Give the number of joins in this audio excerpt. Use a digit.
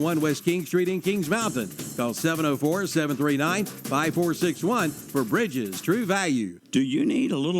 1